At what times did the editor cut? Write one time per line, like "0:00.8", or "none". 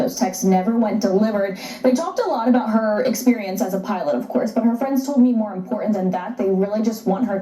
0:03.8

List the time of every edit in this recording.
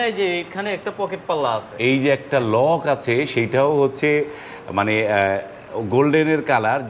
none

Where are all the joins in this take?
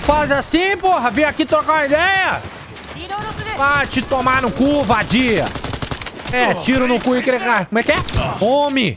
0:07.7

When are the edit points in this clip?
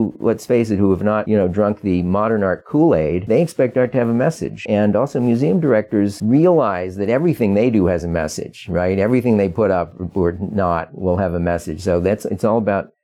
none

